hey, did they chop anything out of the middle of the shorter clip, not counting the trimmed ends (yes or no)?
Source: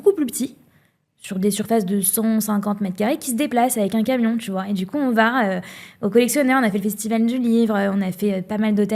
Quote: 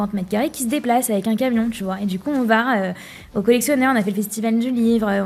no